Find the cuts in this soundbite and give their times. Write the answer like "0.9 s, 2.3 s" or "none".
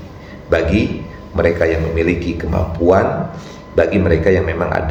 none